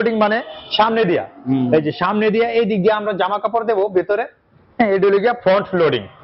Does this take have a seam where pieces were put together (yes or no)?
no